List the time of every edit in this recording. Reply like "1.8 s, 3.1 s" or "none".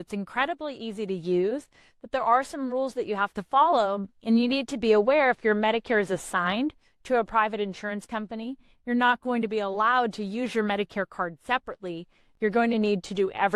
none